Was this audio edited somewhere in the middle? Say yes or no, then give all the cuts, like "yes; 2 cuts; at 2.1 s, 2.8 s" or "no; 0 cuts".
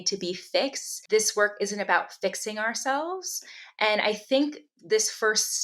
no; 0 cuts